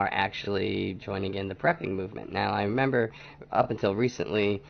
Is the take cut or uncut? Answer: cut